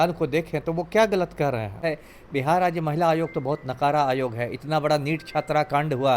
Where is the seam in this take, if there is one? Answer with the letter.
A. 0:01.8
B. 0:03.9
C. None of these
A